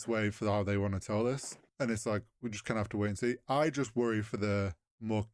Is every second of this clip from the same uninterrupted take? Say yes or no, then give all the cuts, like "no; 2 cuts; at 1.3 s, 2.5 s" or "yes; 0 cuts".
yes; 0 cuts